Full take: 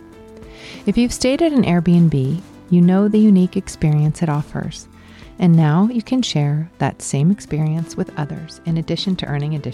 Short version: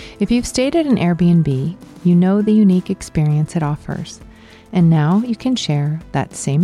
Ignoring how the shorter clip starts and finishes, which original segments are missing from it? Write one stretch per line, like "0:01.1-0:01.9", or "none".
none